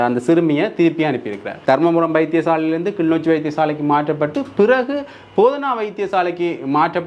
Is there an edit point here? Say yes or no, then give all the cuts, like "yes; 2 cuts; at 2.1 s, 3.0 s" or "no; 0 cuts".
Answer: yes; 1 cut; at 1.5 s